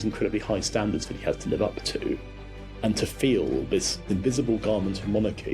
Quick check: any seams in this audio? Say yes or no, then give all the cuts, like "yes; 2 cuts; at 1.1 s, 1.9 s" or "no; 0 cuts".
yes; 2 cuts; at 2.4 s, 4.0 s